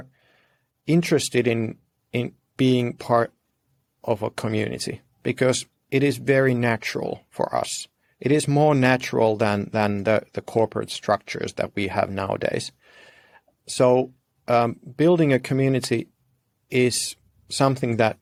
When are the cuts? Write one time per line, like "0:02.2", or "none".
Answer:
none